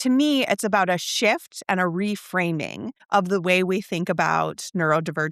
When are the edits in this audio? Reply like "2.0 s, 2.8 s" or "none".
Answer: 2.9 s